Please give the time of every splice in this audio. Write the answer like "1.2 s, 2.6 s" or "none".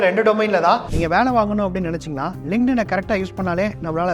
0.9 s